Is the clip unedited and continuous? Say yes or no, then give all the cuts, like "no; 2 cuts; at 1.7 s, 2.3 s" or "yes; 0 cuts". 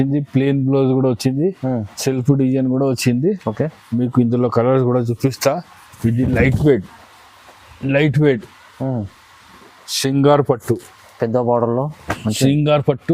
yes; 0 cuts